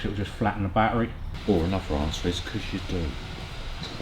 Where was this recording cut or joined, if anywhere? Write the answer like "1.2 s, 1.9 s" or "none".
1.3 s